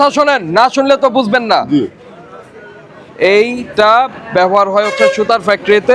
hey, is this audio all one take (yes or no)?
yes